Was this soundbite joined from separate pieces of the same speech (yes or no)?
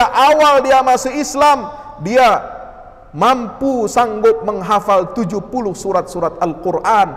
no